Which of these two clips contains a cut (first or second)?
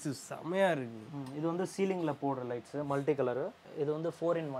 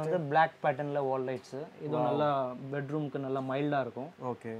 first